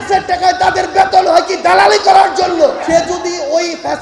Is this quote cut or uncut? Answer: cut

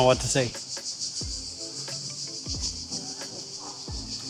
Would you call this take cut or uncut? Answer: uncut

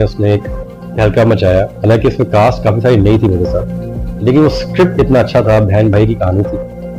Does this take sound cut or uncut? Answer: uncut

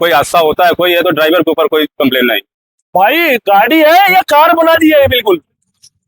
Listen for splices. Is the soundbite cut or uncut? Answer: uncut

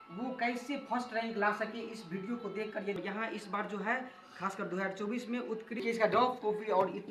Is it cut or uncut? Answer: cut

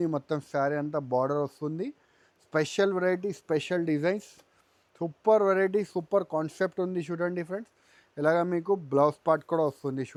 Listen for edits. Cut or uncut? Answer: uncut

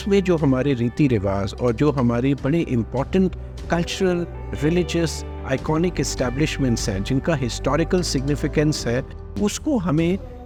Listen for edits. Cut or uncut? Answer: uncut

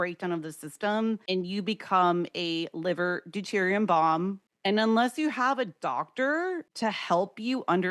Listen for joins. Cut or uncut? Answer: cut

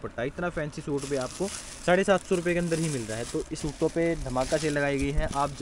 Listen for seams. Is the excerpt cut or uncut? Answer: cut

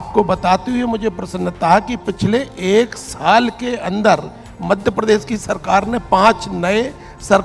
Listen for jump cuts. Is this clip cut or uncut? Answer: uncut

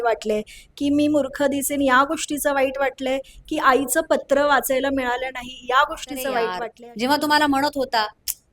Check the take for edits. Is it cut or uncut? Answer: cut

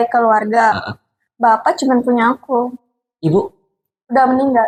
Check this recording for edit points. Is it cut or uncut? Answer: uncut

